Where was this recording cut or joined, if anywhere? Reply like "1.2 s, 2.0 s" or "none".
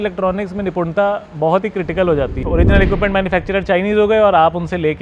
2.4 s